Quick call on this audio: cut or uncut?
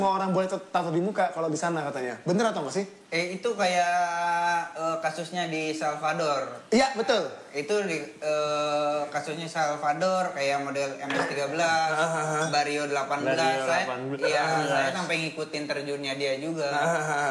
uncut